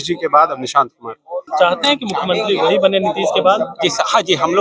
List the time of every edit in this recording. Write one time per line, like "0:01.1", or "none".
0:01.4